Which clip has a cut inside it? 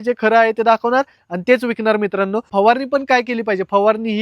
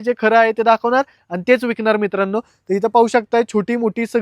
first; 1 cut; at 2.5 s

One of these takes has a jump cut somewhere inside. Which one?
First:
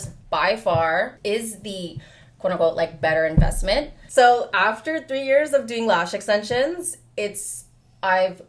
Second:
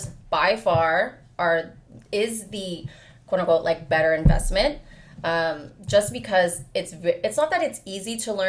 first; 2 cuts; at 1.1 s, 4.0 s

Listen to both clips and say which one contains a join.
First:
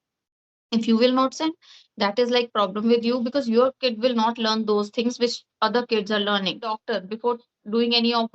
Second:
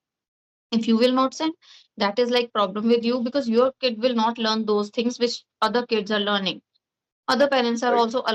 first; 1 cut; at 6.8 s

